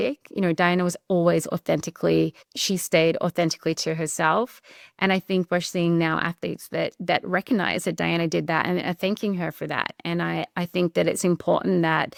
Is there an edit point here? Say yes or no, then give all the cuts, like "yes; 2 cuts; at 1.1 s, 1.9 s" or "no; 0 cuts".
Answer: no; 0 cuts